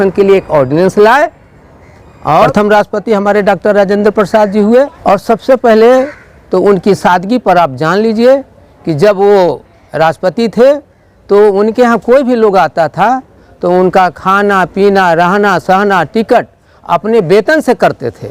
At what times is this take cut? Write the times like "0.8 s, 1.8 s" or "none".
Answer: 2.5 s, 5.0 s